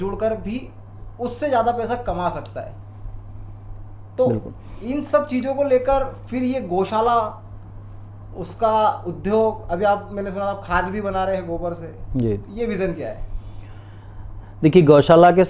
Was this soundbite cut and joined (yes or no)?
no